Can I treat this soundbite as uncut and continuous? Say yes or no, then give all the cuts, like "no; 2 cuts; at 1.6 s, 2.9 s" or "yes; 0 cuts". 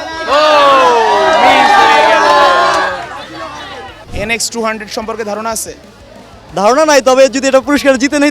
no; 1 cut; at 3.6 s